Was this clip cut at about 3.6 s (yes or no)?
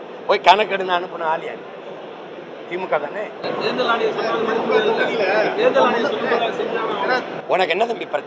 no